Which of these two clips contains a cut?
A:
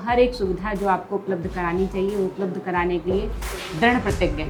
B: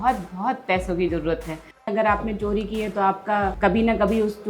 B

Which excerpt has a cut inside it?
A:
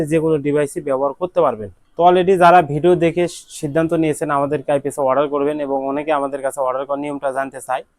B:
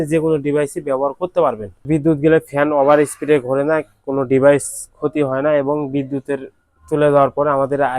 B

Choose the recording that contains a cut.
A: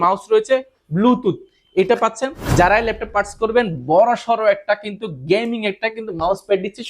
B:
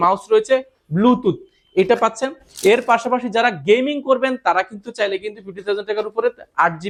A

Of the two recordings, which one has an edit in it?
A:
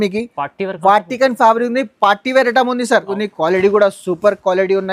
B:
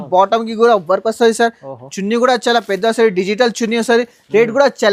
A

